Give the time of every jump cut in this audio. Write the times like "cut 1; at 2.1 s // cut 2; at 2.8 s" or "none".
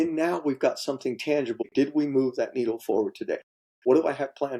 cut 1; at 1.6 s // cut 2; at 3.6 s